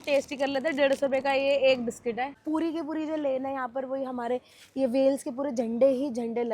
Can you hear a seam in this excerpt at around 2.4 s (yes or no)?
yes